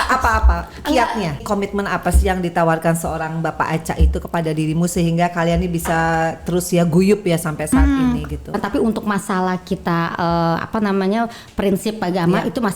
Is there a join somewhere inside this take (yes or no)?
yes